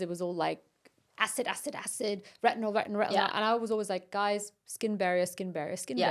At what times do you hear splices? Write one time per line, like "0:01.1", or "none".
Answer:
none